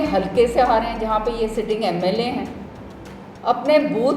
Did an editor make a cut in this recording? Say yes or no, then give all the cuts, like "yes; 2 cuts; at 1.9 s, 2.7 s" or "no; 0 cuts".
no; 0 cuts